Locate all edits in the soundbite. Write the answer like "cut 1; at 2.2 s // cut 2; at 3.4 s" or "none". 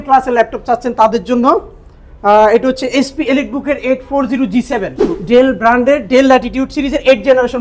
cut 1; at 5.1 s